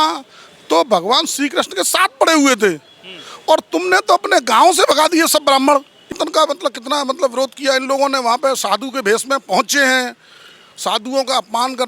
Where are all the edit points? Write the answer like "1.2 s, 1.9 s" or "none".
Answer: 6.1 s